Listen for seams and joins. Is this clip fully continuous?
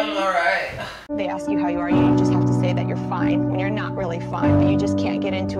yes; 0 cuts

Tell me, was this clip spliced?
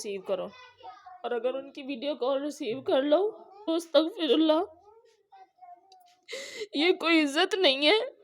yes; 1 cut; at 3.5 s

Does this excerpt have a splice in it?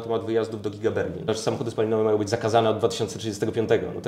yes; 1 cut; at 1.3 s

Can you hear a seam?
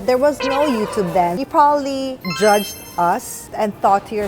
yes; 1 cut; at 1.4 s

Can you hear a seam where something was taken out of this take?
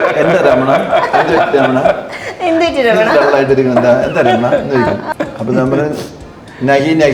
yes; 1 cut; at 5.1 s

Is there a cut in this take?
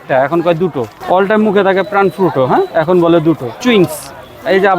yes; 3 cuts; at 1.0 s, 2.7 s, 3.5 s

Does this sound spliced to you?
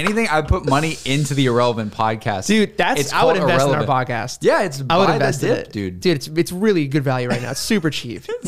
no; 0 cuts

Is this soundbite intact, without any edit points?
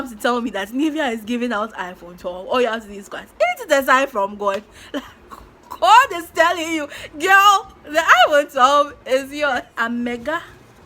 no; 1 cut; at 9.6 s

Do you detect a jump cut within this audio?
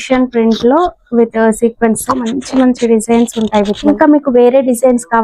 yes; 1 cut; at 3.9 s

